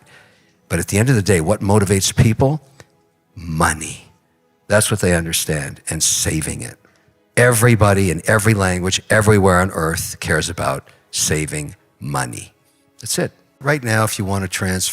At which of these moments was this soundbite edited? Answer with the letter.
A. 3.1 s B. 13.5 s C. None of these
B